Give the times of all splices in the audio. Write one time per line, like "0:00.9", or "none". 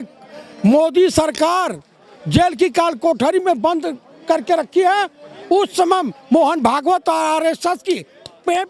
none